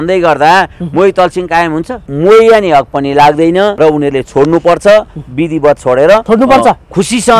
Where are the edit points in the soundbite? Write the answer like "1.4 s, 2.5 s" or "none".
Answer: 2.0 s, 3.7 s, 6.2 s